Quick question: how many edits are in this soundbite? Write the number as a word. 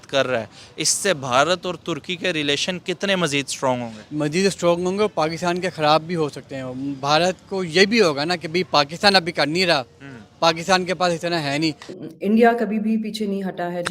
one